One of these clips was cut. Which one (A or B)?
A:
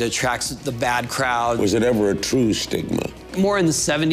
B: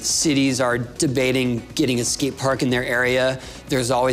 A